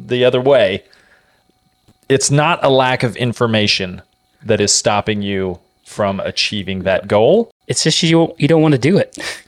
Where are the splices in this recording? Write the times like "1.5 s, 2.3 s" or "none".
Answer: 7.6 s